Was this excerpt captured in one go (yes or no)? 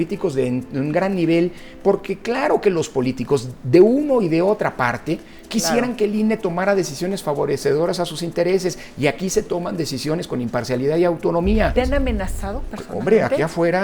no